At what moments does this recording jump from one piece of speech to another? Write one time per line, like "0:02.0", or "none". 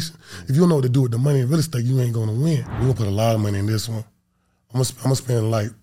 0:02.7